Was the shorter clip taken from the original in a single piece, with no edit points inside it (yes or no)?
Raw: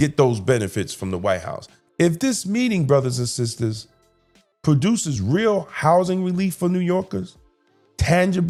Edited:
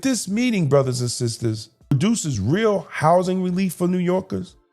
no